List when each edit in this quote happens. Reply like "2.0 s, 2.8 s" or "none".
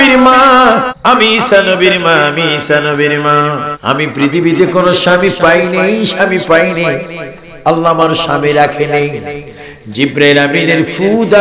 0.9 s, 3.7 s